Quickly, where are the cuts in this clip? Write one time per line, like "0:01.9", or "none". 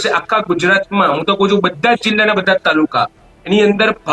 none